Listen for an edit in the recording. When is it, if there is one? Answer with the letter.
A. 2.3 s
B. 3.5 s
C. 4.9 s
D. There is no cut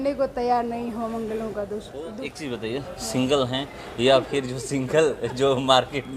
A